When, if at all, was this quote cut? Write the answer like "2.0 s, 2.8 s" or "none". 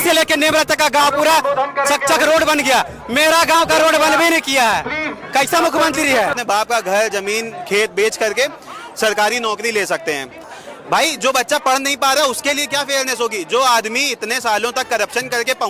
6.3 s, 10.6 s